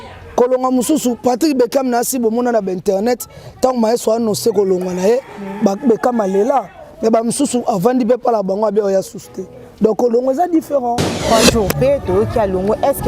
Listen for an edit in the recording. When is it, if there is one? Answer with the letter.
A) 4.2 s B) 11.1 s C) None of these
B